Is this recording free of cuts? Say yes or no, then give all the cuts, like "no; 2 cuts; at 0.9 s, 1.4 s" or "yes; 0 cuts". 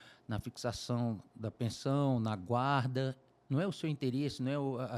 no; 1 cut; at 3.3 s